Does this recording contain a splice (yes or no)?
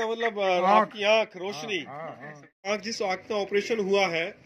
yes